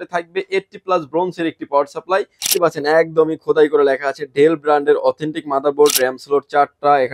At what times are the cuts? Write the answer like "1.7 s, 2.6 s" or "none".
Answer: 2.5 s